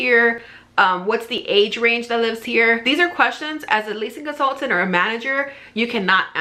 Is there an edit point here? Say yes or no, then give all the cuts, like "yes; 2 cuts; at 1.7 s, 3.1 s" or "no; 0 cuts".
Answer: no; 0 cuts